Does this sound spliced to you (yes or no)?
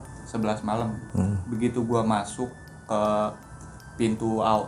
yes